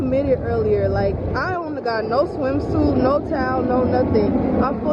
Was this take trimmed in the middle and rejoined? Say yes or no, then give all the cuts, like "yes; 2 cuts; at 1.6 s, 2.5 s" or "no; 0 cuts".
no; 0 cuts